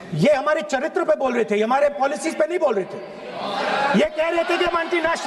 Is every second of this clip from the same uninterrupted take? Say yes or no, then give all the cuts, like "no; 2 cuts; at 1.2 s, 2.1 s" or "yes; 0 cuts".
yes; 0 cuts